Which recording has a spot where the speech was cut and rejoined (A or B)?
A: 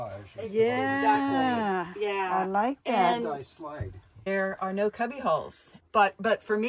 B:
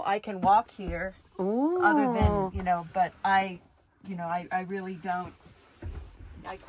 A